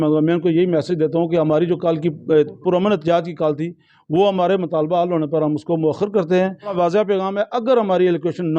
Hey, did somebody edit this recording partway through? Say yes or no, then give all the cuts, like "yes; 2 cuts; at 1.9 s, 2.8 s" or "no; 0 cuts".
yes; 1 cut; at 6.7 s